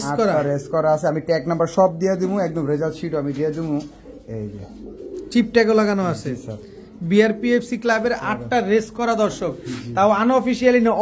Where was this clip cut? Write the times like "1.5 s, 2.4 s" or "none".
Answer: none